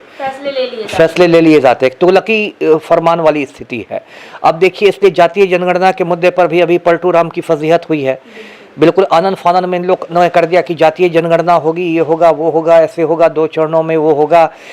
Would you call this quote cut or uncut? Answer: uncut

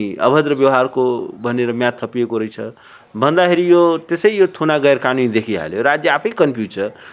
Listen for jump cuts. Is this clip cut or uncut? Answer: uncut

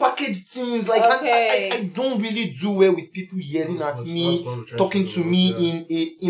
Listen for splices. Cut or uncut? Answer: uncut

